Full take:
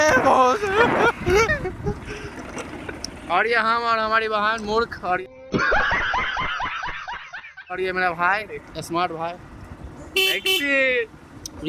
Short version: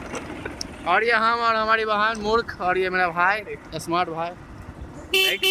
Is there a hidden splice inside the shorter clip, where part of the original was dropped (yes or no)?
yes